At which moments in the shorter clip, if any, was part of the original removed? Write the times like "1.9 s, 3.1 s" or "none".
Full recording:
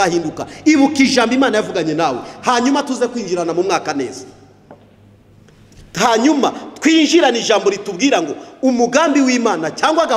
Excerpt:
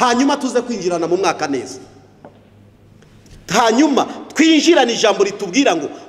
none